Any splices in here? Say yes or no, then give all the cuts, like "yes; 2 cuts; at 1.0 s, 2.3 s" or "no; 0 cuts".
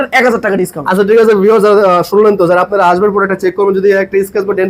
no; 0 cuts